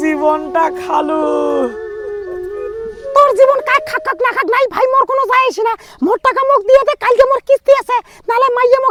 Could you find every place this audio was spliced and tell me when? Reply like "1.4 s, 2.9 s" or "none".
none